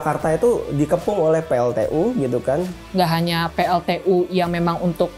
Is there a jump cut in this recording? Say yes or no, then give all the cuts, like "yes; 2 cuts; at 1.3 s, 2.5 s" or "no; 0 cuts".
yes; 1 cut; at 2.8 s